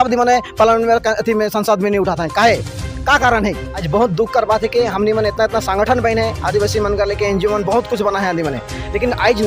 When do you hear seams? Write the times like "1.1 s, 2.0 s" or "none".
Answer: 3.7 s